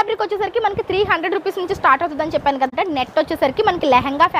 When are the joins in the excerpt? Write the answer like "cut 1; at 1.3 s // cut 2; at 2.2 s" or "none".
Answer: cut 1; at 2.7 s